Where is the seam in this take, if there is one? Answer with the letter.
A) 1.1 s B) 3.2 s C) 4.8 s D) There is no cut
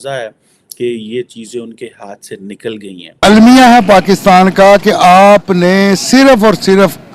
B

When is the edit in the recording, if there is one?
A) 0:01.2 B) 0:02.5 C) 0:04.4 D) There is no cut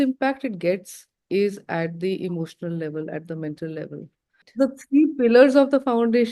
C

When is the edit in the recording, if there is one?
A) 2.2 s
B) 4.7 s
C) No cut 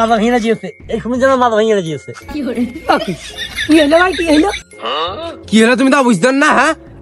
C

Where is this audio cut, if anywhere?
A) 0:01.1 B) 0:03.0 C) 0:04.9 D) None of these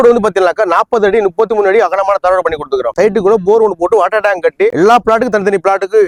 D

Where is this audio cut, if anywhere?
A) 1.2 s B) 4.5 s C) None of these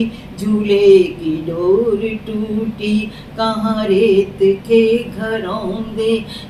C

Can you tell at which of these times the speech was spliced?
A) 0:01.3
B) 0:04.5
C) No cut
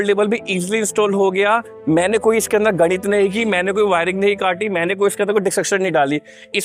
C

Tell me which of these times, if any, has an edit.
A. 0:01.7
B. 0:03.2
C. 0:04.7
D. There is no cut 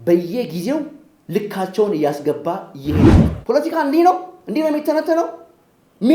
B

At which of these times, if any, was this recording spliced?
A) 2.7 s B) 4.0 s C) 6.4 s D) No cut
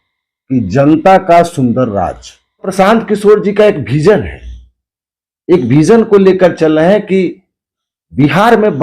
A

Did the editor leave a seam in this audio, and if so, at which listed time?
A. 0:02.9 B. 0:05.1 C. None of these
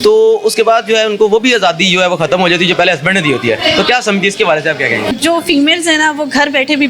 B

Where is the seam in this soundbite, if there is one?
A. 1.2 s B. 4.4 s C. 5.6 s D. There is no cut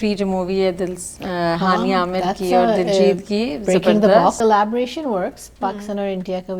B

